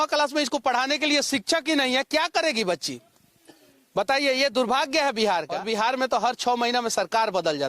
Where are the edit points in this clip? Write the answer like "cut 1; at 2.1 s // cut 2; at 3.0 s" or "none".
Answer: cut 1; at 5.6 s